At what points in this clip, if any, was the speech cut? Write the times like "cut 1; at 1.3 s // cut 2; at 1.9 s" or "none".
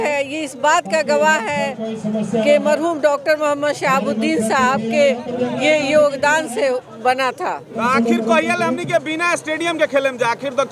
cut 1; at 7.8 s

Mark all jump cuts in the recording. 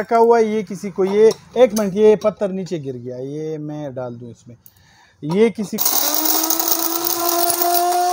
cut 1; at 5.8 s

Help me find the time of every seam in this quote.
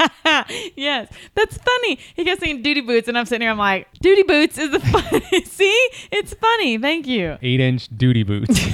cut 1; at 3.9 s // cut 2; at 7.4 s

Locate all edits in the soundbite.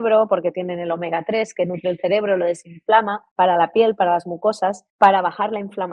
cut 1; at 3.2 s // cut 2; at 4.8 s

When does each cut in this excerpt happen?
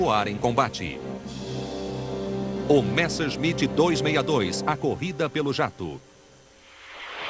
cut 1; at 3.7 s

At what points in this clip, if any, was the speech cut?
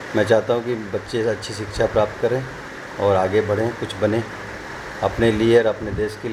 none

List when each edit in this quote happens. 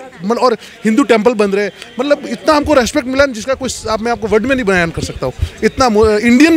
none

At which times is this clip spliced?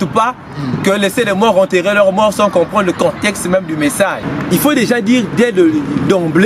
cut 1; at 4.2 s

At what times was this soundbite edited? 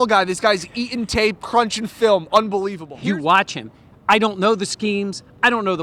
cut 1; at 2.8 s

